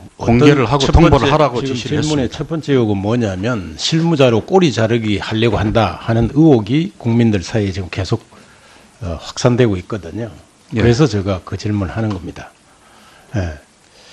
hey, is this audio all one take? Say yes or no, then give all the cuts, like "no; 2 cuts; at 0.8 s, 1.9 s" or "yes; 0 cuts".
yes; 0 cuts